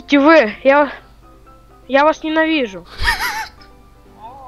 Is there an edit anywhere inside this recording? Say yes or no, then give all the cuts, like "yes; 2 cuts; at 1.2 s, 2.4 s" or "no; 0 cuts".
no; 0 cuts